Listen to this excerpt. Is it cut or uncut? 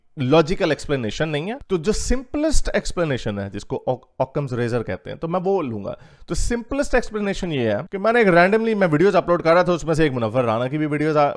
uncut